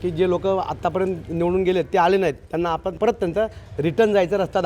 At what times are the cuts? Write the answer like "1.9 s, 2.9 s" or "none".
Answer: 2.8 s